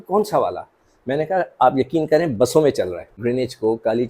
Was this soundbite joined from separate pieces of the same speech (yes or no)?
yes